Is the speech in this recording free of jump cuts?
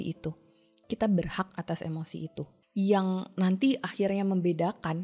no; 1 cut; at 2.6 s

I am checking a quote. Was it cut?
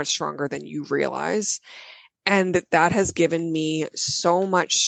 no; 0 cuts

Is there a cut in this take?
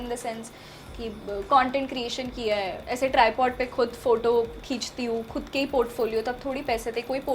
no; 0 cuts

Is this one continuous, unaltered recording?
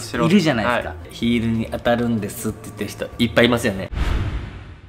no; 1 cut; at 3.9 s

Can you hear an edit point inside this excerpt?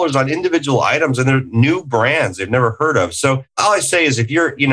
yes; 1 cut; at 3.6 s

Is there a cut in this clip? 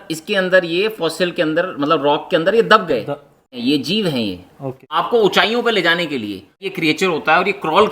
yes; 3 cuts; at 3.6 s, 5.0 s, 6.6 s

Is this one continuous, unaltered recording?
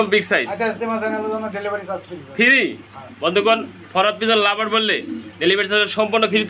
yes; 0 cuts

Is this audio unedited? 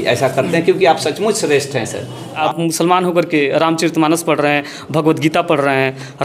no; 1 cut; at 2.4 s

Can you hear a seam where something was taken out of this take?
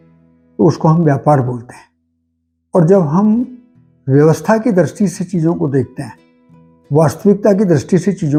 no; 0 cuts

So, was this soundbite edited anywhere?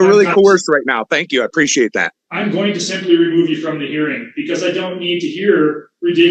yes; 1 cut; at 2.2 s

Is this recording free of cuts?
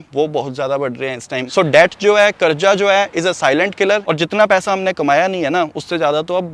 no; 2 cuts; at 1.5 s, 4.0 s

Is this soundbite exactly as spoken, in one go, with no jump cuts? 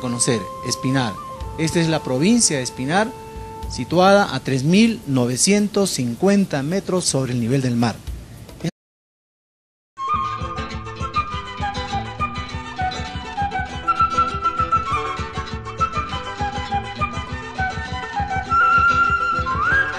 yes; 0 cuts

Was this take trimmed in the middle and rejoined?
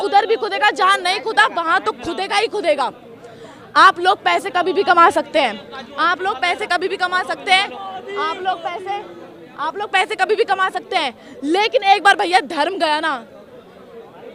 no; 0 cuts

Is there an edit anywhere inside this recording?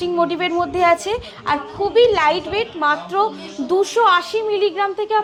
no; 0 cuts

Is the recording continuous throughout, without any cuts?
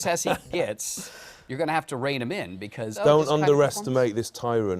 no; 1 cut; at 2.9 s

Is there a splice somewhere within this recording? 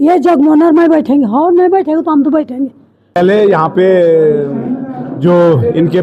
yes; 1 cut; at 3.2 s

